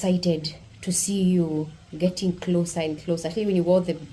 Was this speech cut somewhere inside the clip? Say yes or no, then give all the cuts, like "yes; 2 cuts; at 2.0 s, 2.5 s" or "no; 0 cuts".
no; 0 cuts